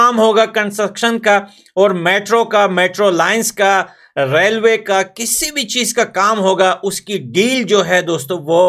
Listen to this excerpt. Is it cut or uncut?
uncut